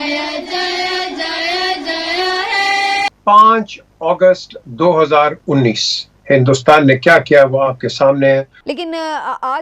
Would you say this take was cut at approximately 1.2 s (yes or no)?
no